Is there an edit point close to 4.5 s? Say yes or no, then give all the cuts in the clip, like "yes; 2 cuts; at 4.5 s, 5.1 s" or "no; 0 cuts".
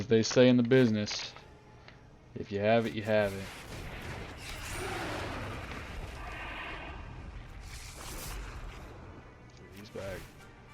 no; 1 cut; at 9.8 s